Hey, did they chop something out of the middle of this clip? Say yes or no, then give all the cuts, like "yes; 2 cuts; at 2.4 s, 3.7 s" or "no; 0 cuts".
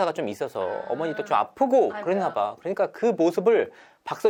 no; 0 cuts